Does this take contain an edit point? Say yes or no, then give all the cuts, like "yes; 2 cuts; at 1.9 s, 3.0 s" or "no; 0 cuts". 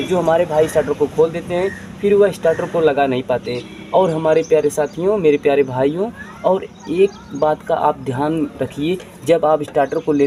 no; 0 cuts